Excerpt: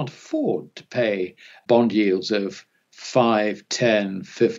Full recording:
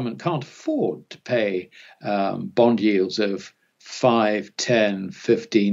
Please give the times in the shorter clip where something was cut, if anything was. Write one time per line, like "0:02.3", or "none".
0:01.6